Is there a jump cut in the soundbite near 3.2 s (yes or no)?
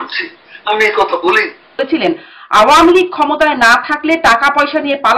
no